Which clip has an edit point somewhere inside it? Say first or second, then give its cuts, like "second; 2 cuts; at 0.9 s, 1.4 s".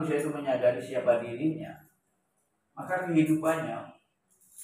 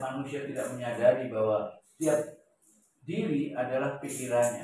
second; 1 cut; at 1.8 s